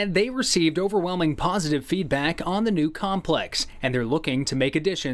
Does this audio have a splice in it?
no; 0 cuts

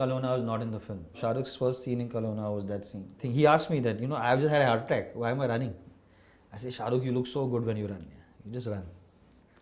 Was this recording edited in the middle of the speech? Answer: yes; 2 cuts; at 1.2 s, 3.2 s

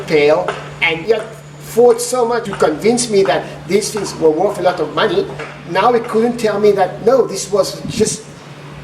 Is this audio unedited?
no; 3 cuts; at 0.9 s, 2.5 s, 5.5 s

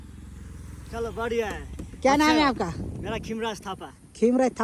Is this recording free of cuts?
yes; 0 cuts

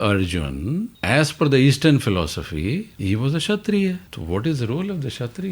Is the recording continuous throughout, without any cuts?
no; 3 cuts; at 0.9 s, 2.9 s, 4.1 s

